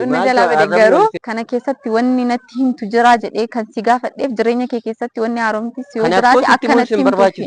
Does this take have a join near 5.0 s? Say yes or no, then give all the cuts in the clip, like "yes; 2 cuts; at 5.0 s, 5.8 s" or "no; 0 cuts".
no; 1 cut; at 1.2 s